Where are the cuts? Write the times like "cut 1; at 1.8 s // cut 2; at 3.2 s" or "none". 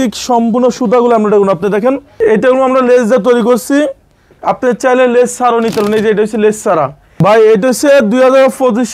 cut 1; at 2.1 s // cut 2; at 7.1 s